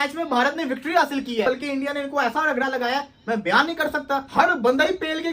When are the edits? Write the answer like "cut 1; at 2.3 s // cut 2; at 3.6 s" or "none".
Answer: cut 1; at 1.5 s // cut 2; at 4.3 s